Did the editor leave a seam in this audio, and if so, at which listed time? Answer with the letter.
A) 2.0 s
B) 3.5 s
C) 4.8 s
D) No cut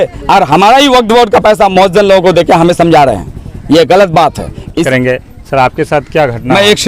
C